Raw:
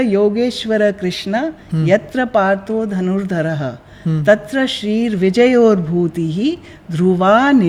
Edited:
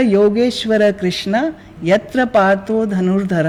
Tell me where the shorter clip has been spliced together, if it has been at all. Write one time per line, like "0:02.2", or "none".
none